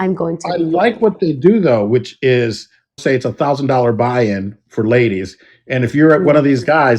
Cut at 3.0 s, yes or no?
yes